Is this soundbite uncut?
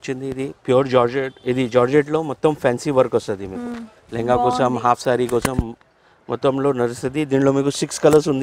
yes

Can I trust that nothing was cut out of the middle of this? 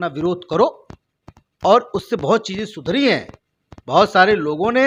yes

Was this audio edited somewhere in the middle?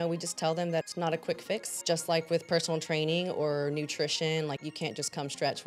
yes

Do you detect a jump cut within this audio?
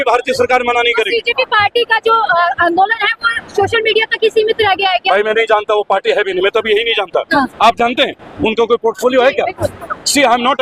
no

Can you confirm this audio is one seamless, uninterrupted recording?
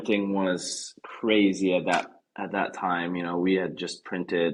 yes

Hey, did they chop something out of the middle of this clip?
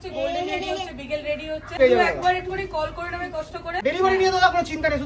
yes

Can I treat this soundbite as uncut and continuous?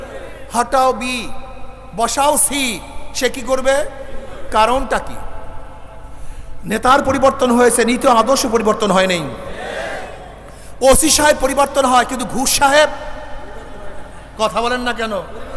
yes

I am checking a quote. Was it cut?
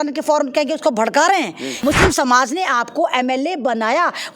yes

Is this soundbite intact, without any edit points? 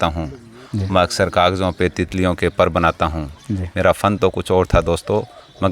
yes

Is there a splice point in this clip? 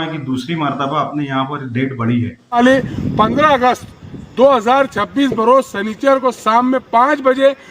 yes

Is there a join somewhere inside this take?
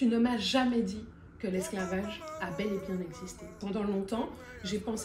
no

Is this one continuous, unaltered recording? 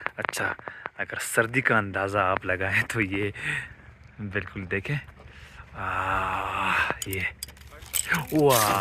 yes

